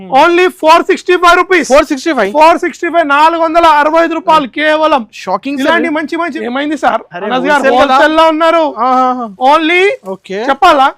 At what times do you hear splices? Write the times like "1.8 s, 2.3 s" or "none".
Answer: 6.3 s